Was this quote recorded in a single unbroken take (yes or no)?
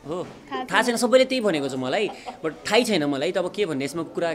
yes